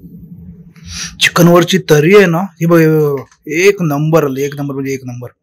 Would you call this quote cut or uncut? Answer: uncut